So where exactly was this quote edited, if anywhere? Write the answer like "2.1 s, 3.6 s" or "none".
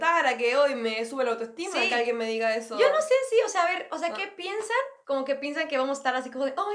none